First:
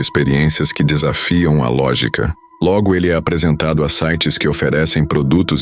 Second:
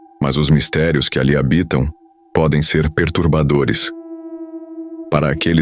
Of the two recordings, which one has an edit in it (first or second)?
first